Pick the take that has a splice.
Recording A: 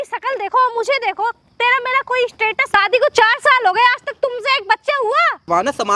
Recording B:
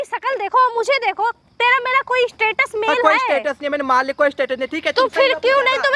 A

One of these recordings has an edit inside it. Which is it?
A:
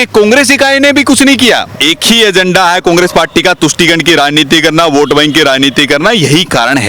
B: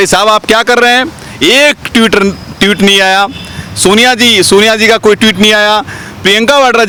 A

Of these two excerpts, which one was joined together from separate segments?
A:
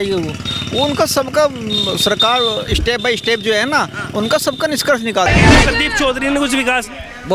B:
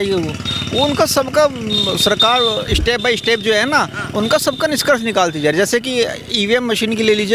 A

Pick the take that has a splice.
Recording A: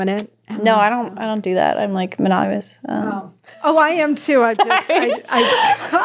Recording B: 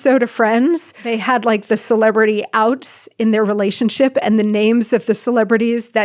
B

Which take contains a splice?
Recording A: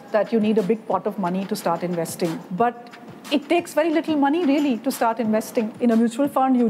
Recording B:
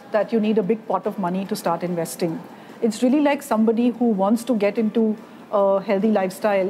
A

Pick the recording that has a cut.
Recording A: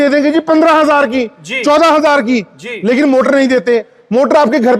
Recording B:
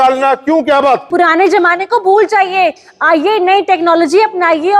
B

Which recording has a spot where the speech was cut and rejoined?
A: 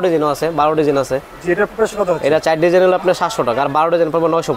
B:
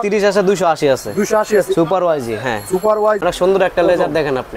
B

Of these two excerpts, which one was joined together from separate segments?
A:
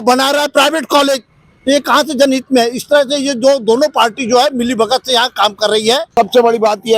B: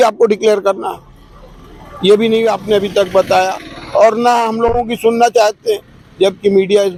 A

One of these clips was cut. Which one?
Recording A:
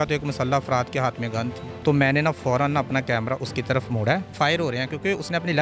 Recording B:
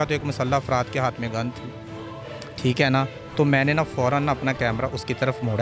A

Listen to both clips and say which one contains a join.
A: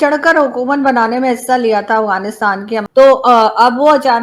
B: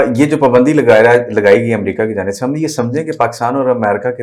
A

